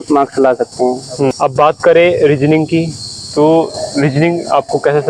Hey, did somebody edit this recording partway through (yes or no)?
no